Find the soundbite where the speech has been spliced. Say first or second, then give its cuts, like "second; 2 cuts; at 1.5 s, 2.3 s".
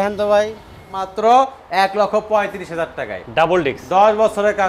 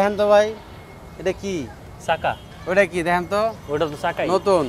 first; 1 cut; at 1.1 s